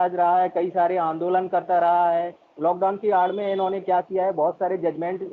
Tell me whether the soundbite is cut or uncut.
uncut